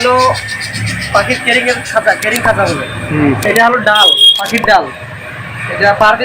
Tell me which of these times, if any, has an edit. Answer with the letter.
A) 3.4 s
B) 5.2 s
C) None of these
A